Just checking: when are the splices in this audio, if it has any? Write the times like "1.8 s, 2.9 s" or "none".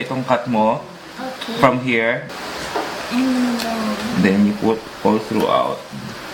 none